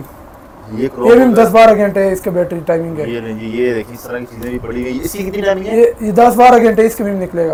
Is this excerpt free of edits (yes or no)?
yes